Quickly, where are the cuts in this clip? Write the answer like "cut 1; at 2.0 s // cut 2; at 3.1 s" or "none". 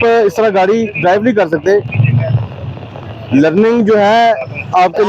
none